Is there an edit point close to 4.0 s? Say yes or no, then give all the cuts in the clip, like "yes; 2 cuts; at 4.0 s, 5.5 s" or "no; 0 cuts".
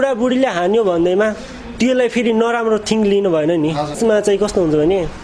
yes; 1 cut; at 4.0 s